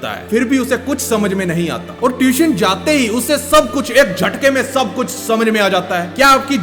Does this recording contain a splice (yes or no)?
no